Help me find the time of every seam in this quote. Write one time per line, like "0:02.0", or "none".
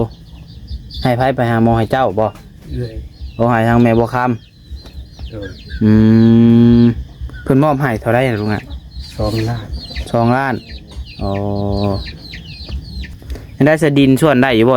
0:13.1